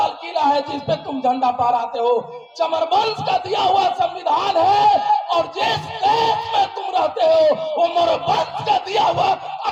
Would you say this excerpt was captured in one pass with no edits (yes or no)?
yes